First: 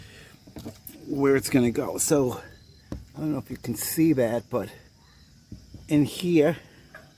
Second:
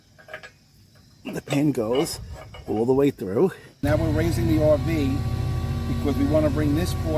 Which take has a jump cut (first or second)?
second